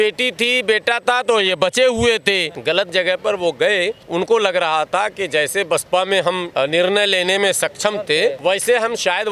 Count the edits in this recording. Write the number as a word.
four